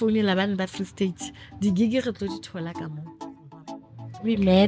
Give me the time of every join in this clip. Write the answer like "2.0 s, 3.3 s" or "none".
3.6 s